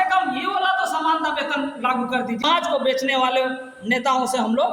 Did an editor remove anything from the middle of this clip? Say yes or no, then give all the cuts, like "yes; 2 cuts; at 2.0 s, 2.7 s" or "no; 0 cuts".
yes; 1 cut; at 2.7 s